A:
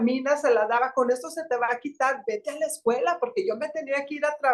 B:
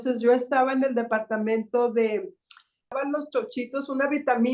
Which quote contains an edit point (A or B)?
B